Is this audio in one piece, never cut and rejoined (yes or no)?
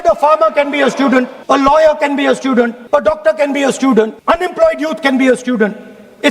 no